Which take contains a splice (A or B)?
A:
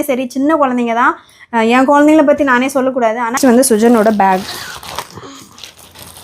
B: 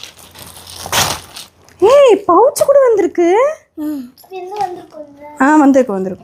A